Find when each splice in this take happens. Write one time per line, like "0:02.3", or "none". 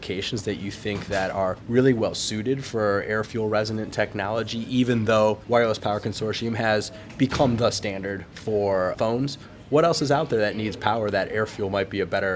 0:01.6
0:05.4
0:08.9